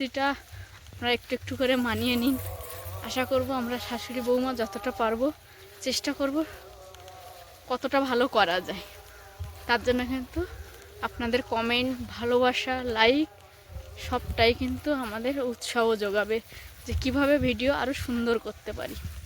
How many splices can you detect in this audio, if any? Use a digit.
0